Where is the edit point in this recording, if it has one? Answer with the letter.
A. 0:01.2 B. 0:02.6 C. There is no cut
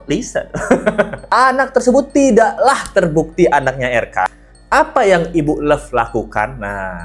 A